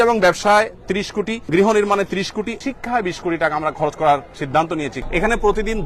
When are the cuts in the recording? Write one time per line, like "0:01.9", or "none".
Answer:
0:01.5
0:02.6
0:04.9

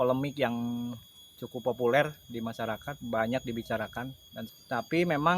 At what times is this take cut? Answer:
0:04.3

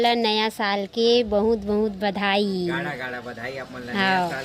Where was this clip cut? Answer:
none

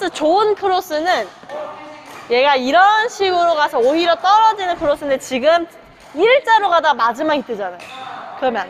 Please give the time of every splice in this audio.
none

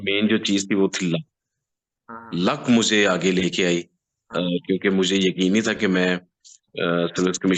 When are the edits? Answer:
none

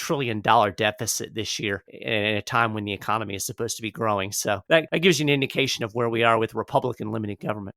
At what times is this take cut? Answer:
0:01.9
0:04.8

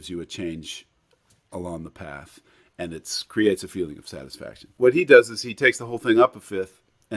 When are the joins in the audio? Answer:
0:04.7

